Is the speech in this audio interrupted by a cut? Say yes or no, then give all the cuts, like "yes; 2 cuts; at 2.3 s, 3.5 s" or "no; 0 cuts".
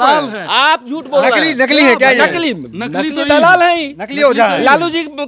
no; 0 cuts